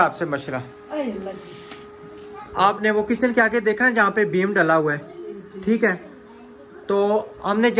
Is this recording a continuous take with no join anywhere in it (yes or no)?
yes